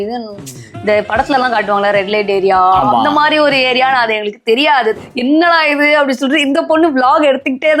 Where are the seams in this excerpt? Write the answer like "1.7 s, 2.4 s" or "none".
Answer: 5.0 s